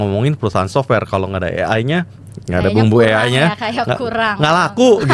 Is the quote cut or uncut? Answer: uncut